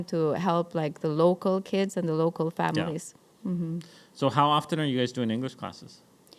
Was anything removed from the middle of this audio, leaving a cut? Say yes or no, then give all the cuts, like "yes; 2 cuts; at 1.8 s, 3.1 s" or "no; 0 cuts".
no; 0 cuts